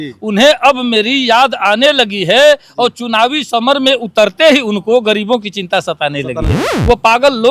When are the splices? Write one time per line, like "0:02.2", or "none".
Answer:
0:06.6